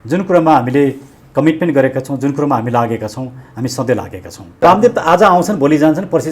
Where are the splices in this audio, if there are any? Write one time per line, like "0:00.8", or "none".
0:04.6